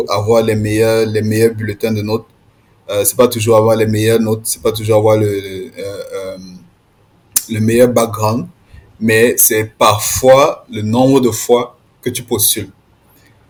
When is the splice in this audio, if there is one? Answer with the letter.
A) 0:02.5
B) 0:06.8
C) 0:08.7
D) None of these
D